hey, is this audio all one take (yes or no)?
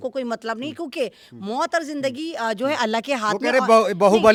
yes